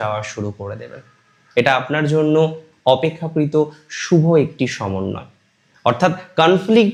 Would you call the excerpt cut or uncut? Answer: uncut